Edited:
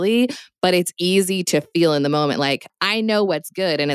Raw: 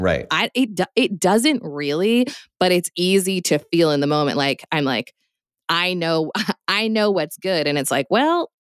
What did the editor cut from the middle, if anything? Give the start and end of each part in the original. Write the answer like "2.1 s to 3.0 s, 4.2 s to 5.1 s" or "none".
4.7 s to 6.6 s